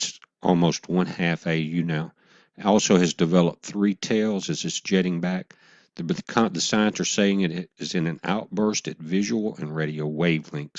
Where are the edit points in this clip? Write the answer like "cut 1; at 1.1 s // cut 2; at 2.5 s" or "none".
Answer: cut 1; at 1.2 s